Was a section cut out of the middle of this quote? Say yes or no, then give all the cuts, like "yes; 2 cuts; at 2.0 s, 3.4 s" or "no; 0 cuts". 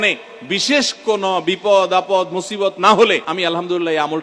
yes; 1 cut; at 3.3 s